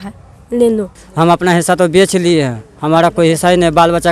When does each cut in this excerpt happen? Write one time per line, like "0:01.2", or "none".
0:01.0